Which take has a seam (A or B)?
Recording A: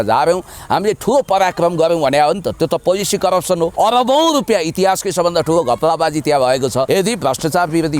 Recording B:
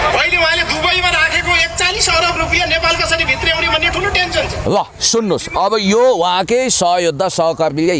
A